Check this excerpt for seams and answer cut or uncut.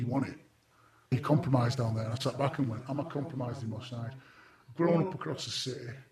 cut